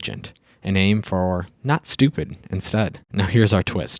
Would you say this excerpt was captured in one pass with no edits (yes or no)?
no